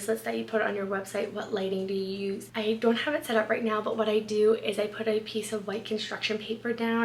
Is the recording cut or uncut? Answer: uncut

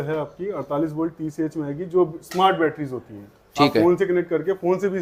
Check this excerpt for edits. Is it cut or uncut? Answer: uncut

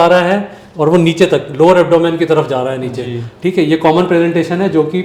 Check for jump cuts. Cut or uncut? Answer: uncut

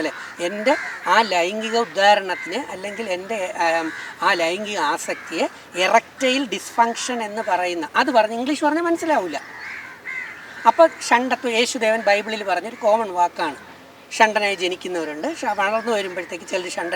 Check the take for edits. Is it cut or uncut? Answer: uncut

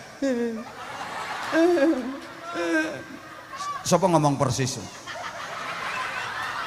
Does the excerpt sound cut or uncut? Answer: uncut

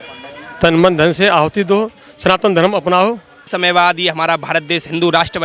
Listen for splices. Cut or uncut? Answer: cut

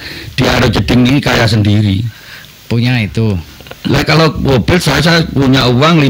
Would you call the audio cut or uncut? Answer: uncut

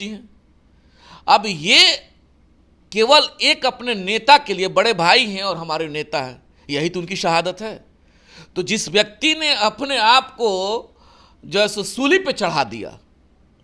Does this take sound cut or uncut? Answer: uncut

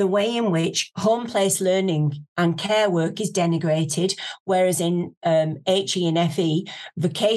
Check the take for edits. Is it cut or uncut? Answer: uncut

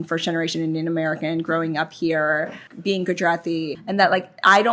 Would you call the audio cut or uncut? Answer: cut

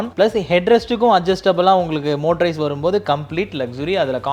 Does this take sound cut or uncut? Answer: uncut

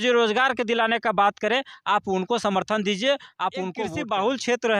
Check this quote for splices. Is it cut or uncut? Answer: cut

